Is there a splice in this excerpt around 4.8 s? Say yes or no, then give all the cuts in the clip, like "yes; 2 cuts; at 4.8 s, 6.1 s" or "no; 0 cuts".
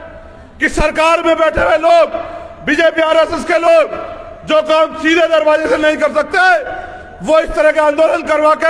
no; 0 cuts